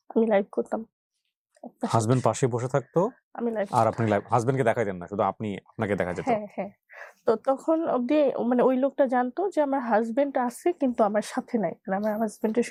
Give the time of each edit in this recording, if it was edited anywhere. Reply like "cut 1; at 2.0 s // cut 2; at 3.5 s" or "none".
none